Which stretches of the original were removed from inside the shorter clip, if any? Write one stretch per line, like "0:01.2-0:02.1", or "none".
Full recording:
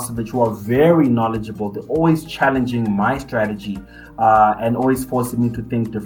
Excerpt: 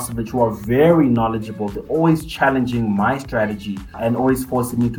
0:04.0-0:04.6